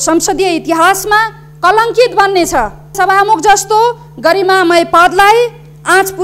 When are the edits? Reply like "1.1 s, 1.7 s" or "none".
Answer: 2.9 s